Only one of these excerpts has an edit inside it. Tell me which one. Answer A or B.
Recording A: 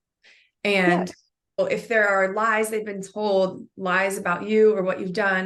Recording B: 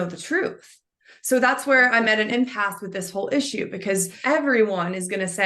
B